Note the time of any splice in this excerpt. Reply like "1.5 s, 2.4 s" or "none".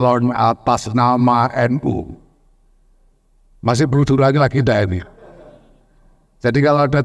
none